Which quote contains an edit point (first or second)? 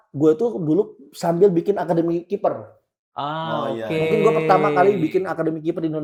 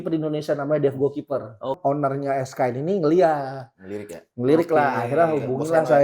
second